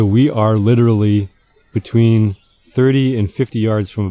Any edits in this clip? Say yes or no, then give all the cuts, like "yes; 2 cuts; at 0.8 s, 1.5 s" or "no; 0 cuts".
no; 0 cuts